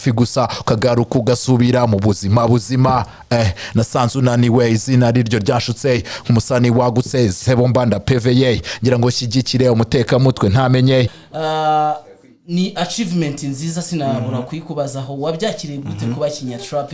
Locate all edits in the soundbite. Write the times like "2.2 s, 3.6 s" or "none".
11.2 s